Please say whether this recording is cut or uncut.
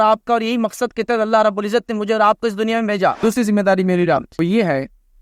cut